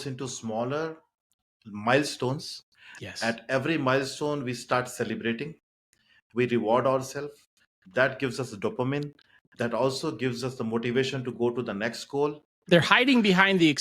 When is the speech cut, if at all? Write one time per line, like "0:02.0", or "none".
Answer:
0:12.5